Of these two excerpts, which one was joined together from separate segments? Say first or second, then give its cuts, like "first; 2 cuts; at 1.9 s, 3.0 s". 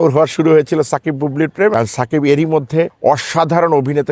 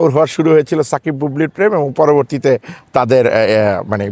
first; 2 cuts; at 1.7 s, 2.9 s